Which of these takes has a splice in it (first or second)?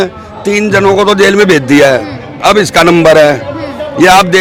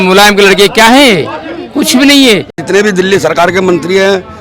second